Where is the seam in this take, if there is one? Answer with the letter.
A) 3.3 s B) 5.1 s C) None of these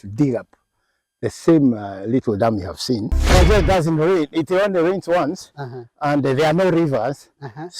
A